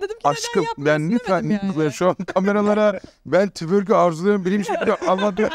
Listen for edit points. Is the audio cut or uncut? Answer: uncut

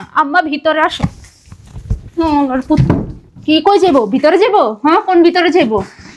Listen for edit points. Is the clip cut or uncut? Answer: uncut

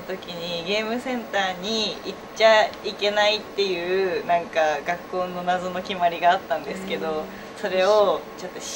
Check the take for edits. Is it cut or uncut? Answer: uncut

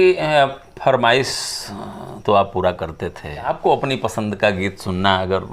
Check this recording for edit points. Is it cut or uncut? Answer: cut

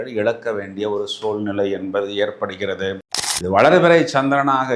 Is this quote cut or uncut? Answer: cut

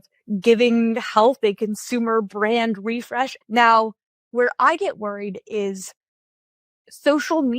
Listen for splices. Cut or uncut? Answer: cut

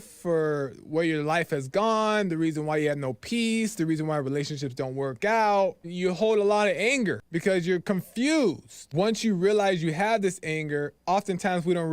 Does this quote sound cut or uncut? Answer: cut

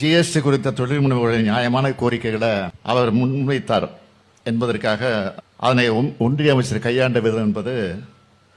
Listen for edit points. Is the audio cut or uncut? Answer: cut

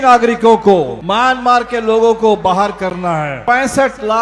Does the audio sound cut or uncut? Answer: cut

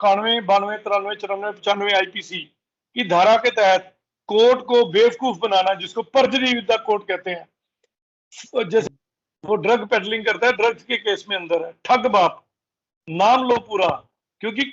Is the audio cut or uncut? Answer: cut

